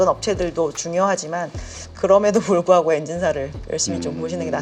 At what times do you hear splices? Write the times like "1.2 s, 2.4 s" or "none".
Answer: none